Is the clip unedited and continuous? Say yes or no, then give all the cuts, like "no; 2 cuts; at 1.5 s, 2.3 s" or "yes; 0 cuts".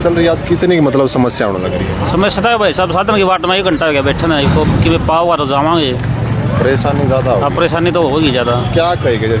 yes; 0 cuts